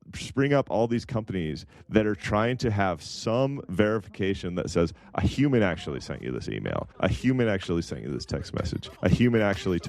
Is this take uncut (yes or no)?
no